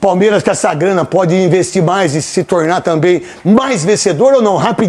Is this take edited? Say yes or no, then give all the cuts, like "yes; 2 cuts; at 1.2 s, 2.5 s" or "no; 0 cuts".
no; 0 cuts